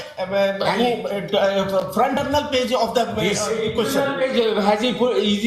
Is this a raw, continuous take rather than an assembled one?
no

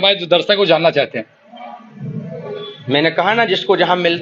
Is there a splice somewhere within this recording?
no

